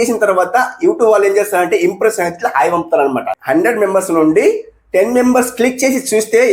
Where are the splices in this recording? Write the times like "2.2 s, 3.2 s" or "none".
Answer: 3.3 s